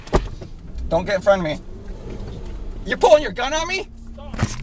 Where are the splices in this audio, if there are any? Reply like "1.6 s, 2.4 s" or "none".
none